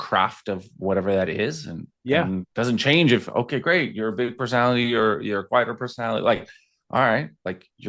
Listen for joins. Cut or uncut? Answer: cut